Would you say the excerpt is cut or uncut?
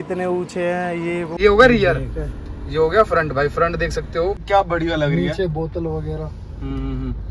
cut